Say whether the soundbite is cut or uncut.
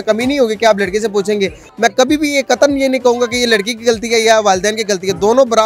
cut